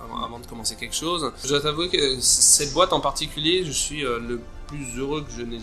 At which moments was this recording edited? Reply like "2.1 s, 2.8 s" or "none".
1.5 s